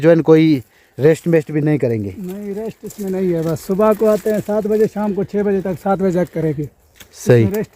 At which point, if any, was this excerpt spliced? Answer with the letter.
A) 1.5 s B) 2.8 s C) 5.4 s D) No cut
D